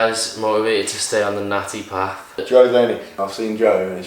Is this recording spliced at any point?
yes; 2 cuts; at 2.4 s, 3.1 s

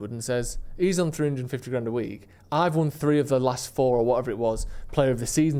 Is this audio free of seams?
yes; 0 cuts

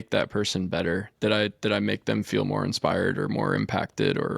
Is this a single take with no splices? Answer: yes; 0 cuts

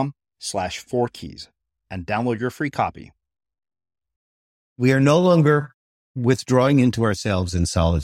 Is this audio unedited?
no; 1 cut; at 4.8 s

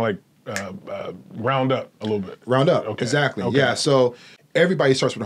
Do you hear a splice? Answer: yes; 1 cut; at 4.3 s

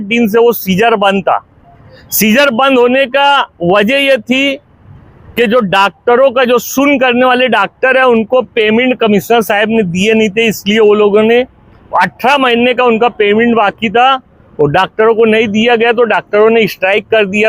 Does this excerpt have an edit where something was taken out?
no; 0 cuts

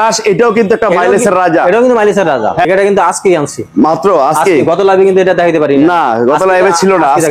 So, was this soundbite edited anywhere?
yes; 1 cut; at 2.7 s

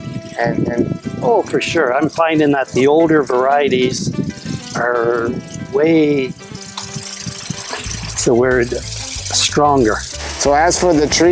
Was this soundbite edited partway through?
yes; 1 cut; at 10.2 s

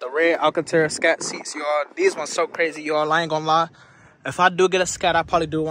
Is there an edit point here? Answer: no; 0 cuts

